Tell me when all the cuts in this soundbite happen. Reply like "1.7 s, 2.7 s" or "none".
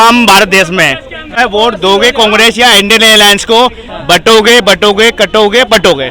1.4 s